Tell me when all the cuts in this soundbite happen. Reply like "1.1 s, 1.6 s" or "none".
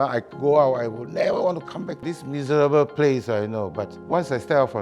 2.1 s, 3.9 s